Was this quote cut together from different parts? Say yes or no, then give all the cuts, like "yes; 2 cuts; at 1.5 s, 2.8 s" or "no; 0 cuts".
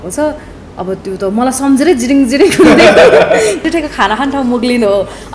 yes; 1 cut; at 3.6 s